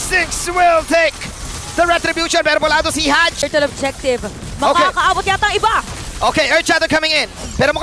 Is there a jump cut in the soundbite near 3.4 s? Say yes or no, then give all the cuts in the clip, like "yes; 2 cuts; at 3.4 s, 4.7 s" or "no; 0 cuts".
yes; 1 cut; at 3.4 s